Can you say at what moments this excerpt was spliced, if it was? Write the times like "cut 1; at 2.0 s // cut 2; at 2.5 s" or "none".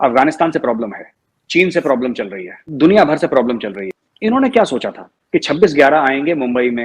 cut 1; at 3.8 s